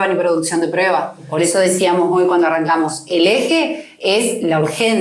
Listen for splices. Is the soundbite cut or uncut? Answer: uncut